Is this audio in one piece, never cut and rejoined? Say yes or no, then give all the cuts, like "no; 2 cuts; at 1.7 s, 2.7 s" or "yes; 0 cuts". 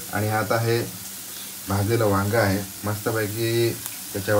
yes; 0 cuts